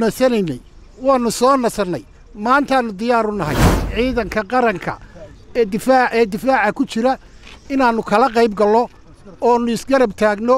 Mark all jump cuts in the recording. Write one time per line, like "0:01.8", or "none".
0:03.9